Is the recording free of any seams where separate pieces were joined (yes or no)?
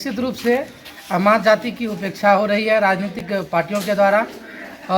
yes